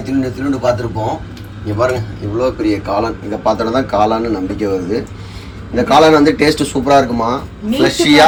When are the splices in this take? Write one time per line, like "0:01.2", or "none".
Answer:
none